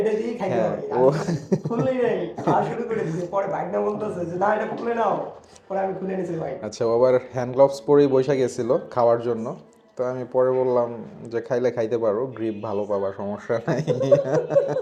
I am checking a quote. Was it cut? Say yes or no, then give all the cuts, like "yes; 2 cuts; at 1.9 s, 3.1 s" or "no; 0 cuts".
no; 0 cuts